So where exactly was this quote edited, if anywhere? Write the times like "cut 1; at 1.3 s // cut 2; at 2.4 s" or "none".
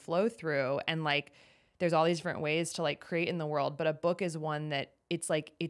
none

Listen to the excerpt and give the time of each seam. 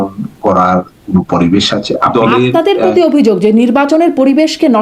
cut 1; at 2.1 s

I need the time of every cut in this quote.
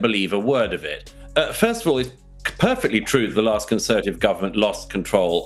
none

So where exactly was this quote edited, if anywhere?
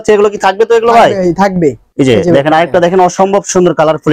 cut 1; at 1.8 s

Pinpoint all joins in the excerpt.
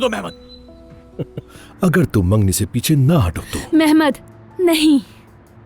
cut 1; at 1.6 s

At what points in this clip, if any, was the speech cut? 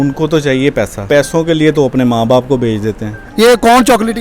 cut 1; at 1.1 s // cut 2; at 3.1 s

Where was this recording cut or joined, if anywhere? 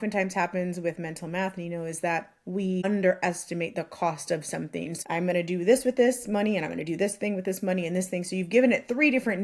cut 1; at 2.8 s // cut 2; at 4.9 s

